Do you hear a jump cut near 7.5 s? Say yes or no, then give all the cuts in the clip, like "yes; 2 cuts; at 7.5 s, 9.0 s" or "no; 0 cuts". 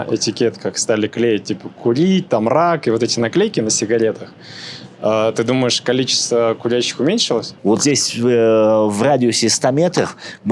yes; 1 cut; at 7.5 s